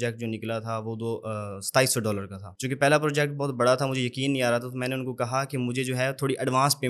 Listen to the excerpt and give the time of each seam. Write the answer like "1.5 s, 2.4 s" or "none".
none